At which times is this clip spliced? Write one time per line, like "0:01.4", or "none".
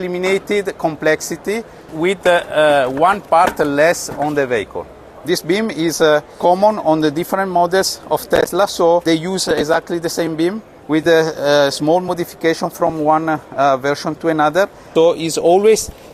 0:05.1
0:06.3
0:09.0
0:10.7
0:14.8